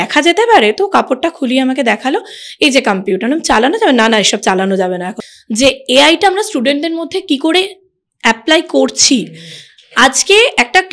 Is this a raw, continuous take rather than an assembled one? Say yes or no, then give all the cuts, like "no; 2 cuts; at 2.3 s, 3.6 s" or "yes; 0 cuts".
no; 1 cut; at 5.2 s